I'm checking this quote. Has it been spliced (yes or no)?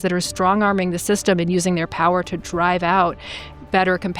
no